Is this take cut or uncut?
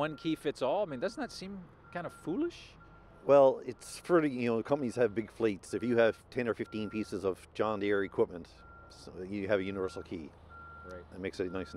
uncut